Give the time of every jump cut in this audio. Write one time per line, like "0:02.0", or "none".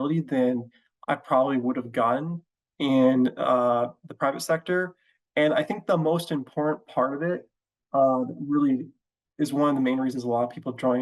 none